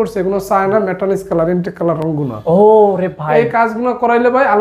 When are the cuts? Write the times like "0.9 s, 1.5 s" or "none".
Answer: none